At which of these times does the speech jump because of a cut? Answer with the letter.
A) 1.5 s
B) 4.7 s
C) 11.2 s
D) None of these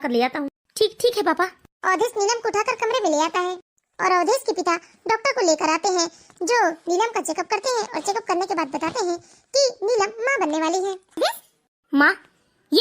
C